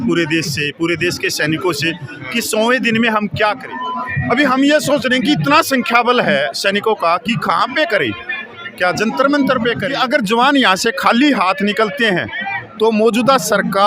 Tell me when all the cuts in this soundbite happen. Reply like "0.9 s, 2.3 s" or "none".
3.7 s, 9.9 s